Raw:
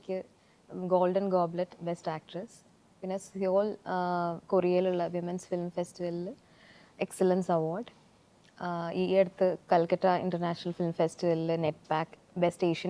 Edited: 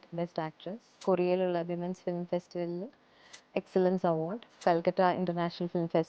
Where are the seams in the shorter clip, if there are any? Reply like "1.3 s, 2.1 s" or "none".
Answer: 0.9 s, 4.6 s